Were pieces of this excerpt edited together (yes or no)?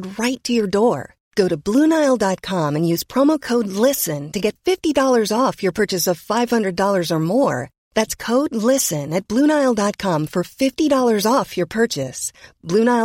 no